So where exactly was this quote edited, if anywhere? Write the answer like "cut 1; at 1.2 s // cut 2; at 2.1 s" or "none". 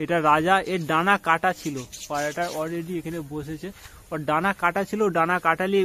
none